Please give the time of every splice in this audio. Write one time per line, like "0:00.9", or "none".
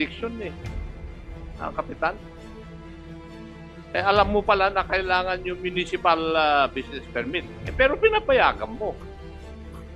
none